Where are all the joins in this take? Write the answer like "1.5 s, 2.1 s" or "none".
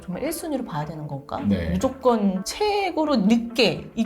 2.5 s